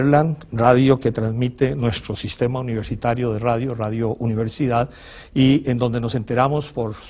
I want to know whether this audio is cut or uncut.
cut